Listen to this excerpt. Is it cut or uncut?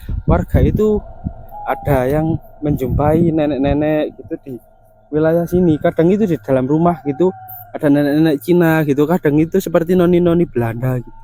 uncut